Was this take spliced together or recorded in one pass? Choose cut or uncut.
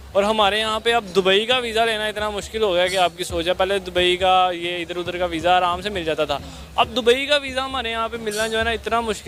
uncut